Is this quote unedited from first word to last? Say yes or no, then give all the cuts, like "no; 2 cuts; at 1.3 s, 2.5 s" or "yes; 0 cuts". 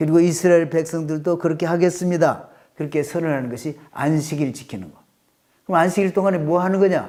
yes; 0 cuts